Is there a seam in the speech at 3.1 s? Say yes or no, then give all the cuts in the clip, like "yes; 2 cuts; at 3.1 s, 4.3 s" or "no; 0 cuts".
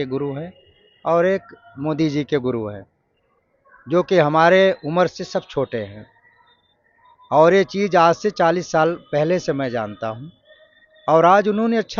no; 0 cuts